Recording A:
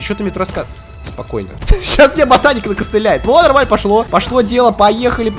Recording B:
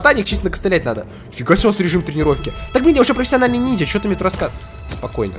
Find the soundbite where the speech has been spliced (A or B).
A